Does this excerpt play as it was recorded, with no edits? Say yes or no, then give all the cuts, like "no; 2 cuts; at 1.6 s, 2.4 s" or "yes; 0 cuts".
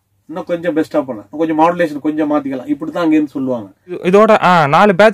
no; 1 cut; at 4.0 s